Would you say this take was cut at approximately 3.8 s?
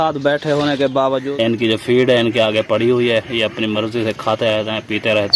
no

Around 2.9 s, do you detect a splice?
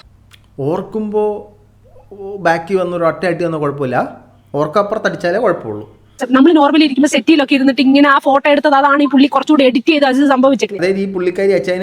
no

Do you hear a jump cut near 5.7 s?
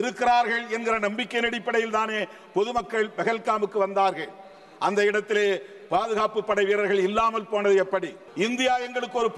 no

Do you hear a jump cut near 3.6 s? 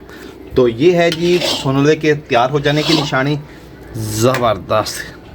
yes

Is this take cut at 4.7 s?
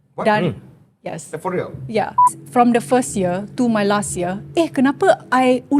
no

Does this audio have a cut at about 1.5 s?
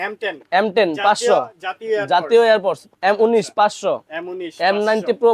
no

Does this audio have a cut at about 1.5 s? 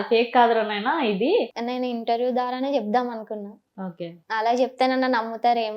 yes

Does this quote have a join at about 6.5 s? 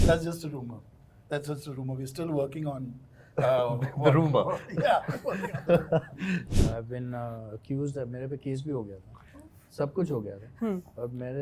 yes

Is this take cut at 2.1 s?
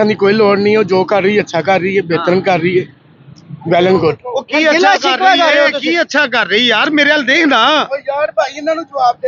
no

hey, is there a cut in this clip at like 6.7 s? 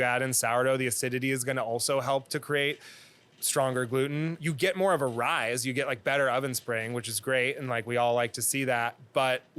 no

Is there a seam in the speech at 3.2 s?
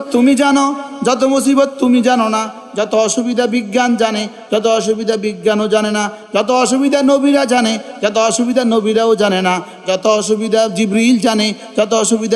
no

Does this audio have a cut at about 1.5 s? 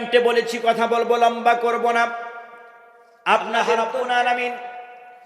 no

